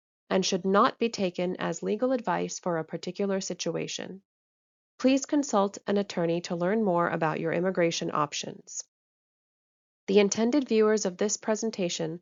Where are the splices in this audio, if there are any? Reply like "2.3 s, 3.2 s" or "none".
none